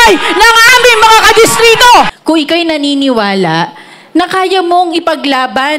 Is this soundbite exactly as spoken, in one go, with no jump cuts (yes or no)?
no